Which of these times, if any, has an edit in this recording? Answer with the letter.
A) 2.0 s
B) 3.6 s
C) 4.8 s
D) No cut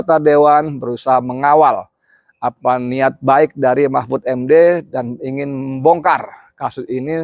D